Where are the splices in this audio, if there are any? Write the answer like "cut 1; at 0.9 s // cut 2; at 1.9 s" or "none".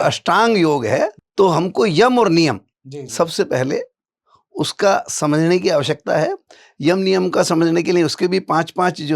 cut 1; at 1.2 s